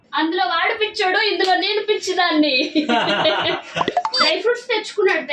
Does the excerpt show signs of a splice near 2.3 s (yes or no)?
no